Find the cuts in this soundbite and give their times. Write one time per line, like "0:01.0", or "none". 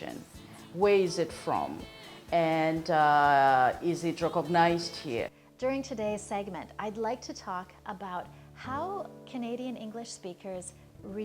0:05.4

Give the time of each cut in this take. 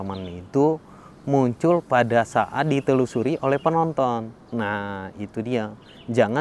none

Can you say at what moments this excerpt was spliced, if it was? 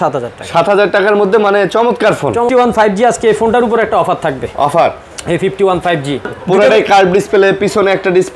0:02.5
0:06.3

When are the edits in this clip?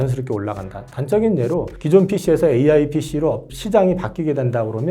0:01.7
0:03.5

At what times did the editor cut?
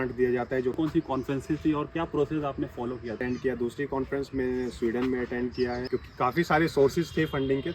0:00.8
0:03.2
0:05.8

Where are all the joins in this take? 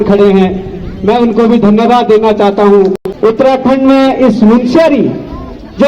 0:03.4

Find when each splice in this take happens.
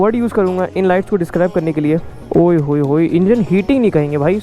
0:02.2

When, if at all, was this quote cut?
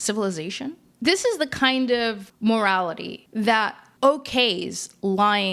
0:00.9
0:02.3
0:03.8

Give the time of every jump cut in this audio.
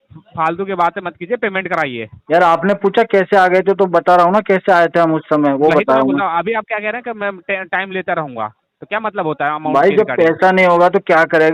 none

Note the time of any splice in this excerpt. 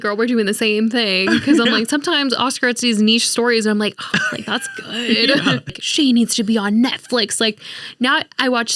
0:05.8

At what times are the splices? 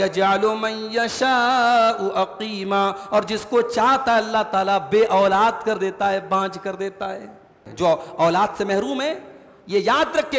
0:07.6

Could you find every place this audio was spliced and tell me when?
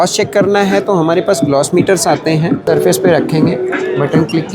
0:02.6

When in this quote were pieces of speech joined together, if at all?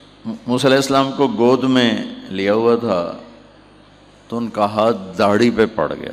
none

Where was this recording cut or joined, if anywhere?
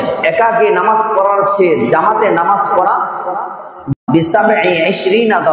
0:03.9

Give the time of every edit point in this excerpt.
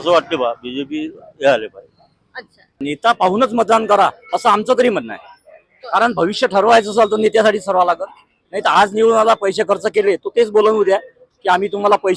0:02.6

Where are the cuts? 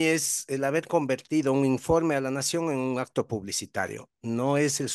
none

